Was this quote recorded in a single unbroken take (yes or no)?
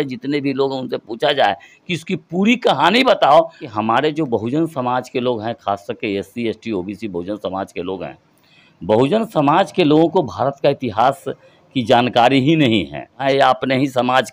no